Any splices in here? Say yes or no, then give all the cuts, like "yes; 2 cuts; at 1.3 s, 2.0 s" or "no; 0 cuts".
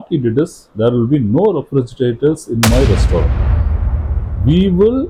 no; 0 cuts